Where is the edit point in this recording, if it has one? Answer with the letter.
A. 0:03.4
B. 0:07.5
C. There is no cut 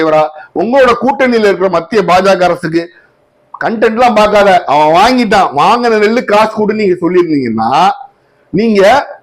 C